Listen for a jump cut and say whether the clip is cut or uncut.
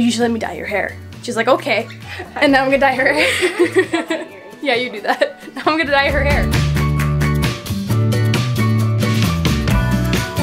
uncut